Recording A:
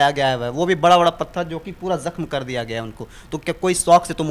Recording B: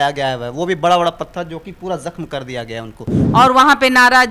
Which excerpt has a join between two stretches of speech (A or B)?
B